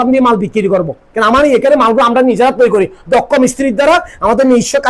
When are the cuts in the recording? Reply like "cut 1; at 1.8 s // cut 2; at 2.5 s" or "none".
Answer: none